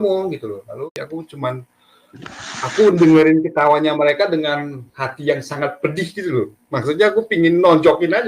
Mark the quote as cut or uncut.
cut